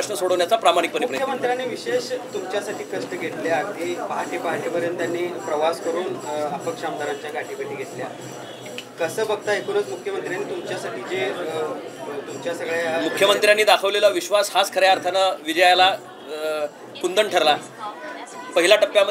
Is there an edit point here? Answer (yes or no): no